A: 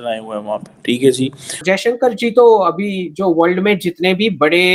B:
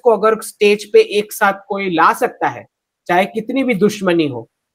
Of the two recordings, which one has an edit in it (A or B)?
A